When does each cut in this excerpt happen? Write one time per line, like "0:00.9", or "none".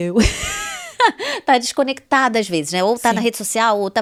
none